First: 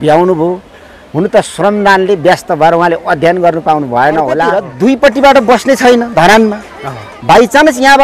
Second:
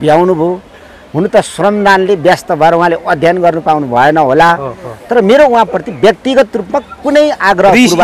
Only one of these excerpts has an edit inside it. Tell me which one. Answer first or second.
first